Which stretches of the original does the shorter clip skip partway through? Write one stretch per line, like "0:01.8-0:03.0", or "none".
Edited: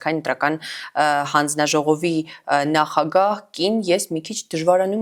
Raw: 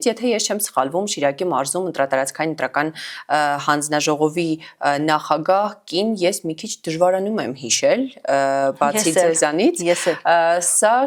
none